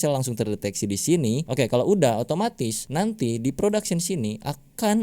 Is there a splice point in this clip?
yes; 2 cuts; at 1.5 s, 2.8 s

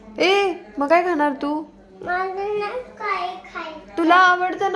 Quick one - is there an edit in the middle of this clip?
no; 0 cuts

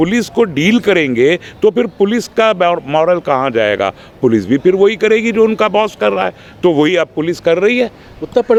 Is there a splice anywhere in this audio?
no; 0 cuts

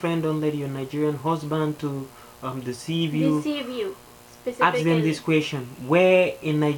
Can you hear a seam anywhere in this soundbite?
no; 0 cuts

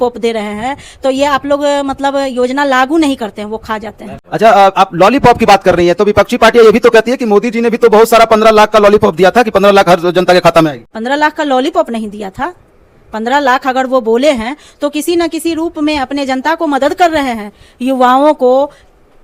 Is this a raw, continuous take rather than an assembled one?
yes; 0 cuts

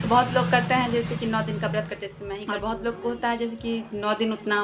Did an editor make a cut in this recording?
yes; 1 cut; at 2.3 s

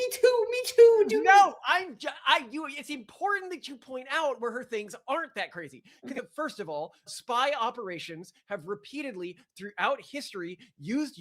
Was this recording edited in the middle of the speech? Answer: yes; 1 cut; at 6.2 s

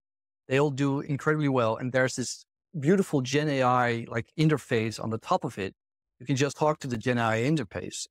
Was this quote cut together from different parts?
yes; 1 cut; at 6.5 s

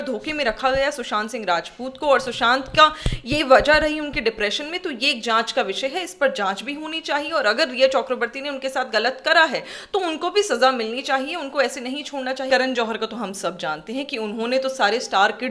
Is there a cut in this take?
yes; 1 cut; at 12.5 s

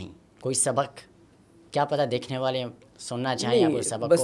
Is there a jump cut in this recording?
no; 0 cuts

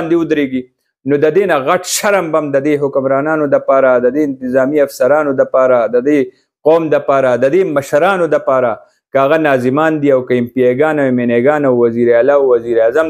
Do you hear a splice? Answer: no; 0 cuts

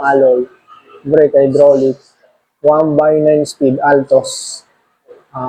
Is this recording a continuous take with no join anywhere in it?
yes; 0 cuts

